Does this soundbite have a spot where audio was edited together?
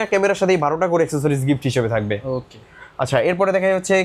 no; 0 cuts

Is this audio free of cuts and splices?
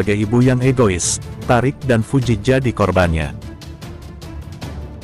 no; 1 cut; at 3.3 s

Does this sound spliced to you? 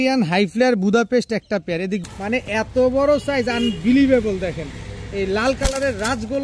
yes; 1 cut; at 2.0 s

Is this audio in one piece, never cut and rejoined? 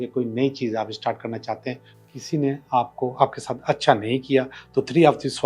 no; 1 cut; at 1.9 s

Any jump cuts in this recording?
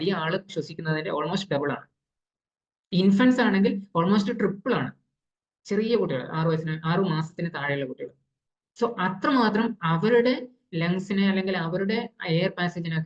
no; 0 cuts

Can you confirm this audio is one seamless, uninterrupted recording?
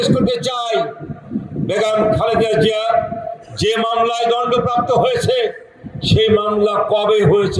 yes; 0 cuts

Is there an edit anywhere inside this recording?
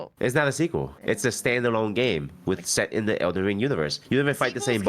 yes; 2 cuts; at 0.9 s, 4.0 s

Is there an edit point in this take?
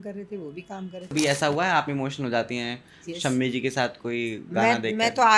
yes; 1 cut; at 1.1 s

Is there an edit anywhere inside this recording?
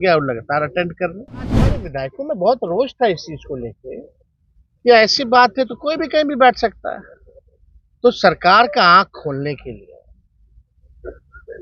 yes; 1 cut; at 1.8 s

